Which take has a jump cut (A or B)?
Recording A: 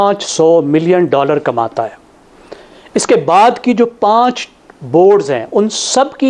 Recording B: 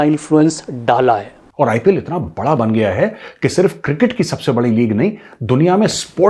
B